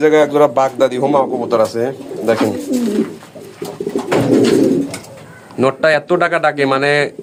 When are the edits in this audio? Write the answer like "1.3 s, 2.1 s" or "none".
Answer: none